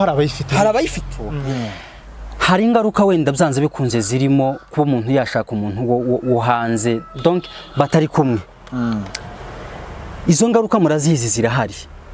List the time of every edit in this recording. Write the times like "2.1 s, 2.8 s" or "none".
1.2 s